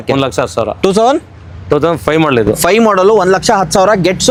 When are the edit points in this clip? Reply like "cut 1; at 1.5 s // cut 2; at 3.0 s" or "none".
none